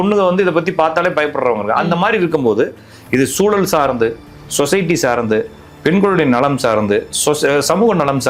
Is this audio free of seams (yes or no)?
yes